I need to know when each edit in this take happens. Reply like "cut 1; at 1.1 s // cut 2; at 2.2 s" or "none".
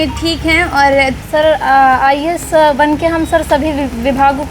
cut 1; at 1.2 s

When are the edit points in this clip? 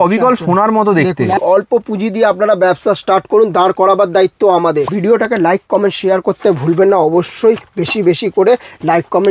cut 1; at 1.4 s // cut 2; at 4.9 s

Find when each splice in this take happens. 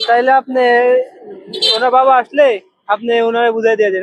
none

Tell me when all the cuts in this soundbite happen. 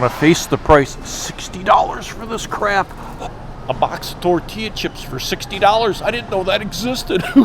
cut 1; at 3.2 s

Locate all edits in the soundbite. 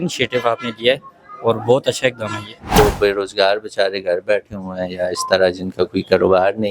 cut 1; at 2.8 s

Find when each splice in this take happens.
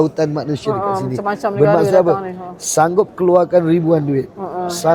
none

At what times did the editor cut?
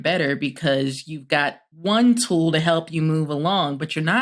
cut 1; at 1.7 s

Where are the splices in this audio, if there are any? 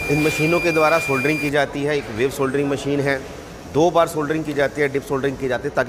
none

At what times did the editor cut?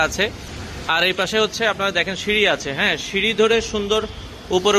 none

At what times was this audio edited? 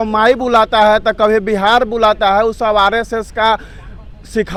none

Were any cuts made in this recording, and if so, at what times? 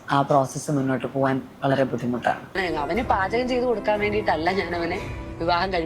cut 1; at 2.6 s

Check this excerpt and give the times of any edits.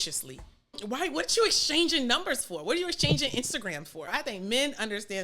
cut 1; at 0.8 s // cut 2; at 4.1 s

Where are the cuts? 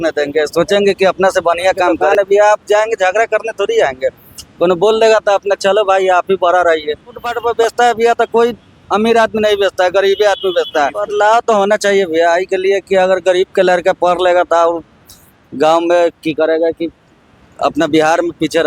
cut 1; at 2.0 s // cut 2; at 7.3 s // cut 3; at 11.0 s

